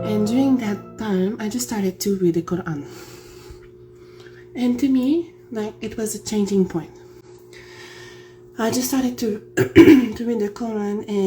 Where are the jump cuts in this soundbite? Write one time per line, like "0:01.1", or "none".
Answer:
none